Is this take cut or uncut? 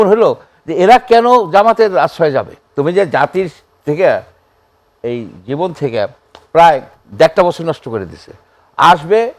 cut